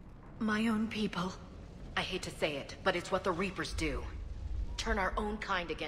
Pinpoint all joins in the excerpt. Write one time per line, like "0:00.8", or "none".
none